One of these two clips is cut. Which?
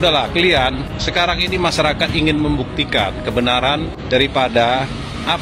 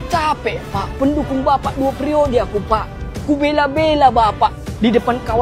first; 2 cuts; at 0.9 s, 4.0 s

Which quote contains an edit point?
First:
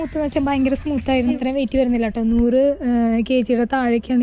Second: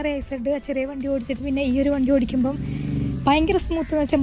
first; 1 cut; at 1.4 s

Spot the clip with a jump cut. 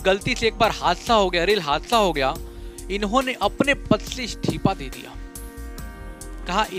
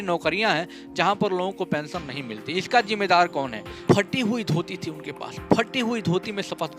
second; 1 cut; at 3.8 s

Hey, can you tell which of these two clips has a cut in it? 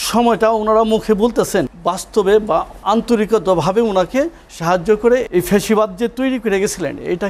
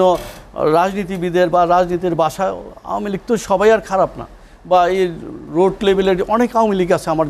first; 3 cuts; at 1.7 s, 2.7 s, 5.3 s

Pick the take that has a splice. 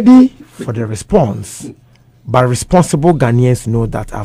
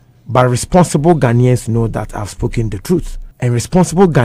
second; 1 cut; at 3.2 s

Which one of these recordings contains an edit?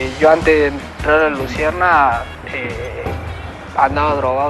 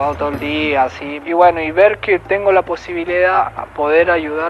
second; 2 cuts; at 1.1 s, 3.4 s

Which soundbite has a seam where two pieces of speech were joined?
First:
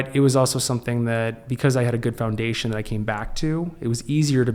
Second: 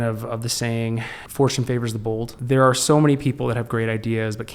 second; 2 cuts; at 1.1 s, 2.3 s

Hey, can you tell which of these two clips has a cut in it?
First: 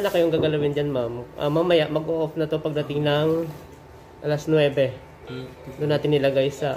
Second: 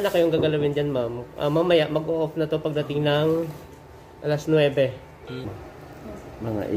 second; 1 cut; at 5.6 s

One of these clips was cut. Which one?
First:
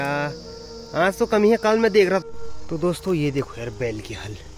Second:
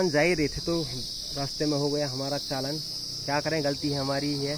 first; 1 cut; at 2.2 s

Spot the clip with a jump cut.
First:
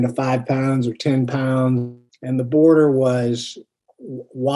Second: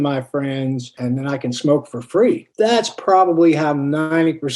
second; 2 cuts; at 1.0 s, 2.5 s

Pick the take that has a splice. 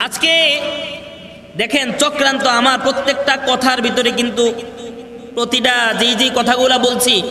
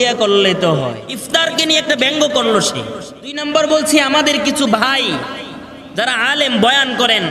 second; 2 cuts; at 1.1 s, 3.4 s

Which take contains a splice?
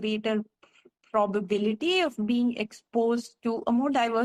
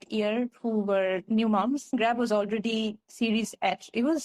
second; 1 cut; at 1.9 s

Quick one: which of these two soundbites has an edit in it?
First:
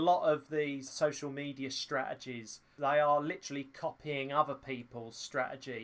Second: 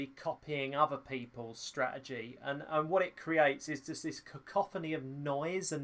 first; 2 cuts; at 0.9 s, 2.6 s

